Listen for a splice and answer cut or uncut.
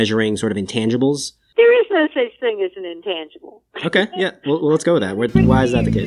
cut